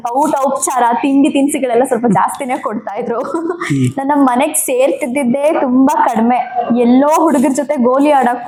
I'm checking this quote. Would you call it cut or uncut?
uncut